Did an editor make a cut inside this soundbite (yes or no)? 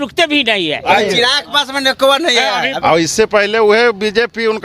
yes